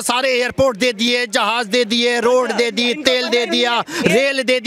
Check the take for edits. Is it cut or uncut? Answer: uncut